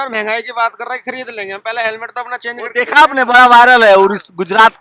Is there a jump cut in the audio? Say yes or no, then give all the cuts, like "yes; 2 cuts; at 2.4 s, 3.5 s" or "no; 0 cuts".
no; 0 cuts